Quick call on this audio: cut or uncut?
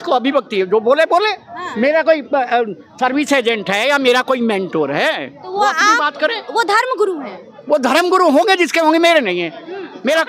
uncut